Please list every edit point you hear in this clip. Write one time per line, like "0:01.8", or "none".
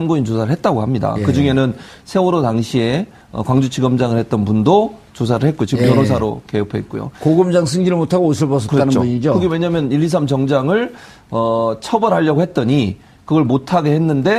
none